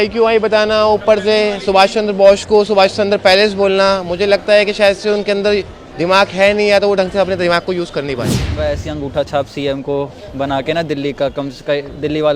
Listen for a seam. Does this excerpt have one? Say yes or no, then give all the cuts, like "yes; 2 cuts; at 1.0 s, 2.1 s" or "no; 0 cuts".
yes; 1 cut; at 8.5 s